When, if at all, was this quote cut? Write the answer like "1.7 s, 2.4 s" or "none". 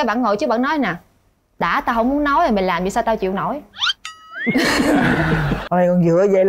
5.5 s